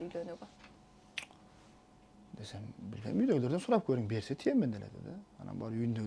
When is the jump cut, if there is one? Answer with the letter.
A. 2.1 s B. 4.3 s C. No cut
A